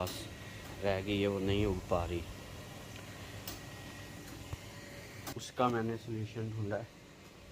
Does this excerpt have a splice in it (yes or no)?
no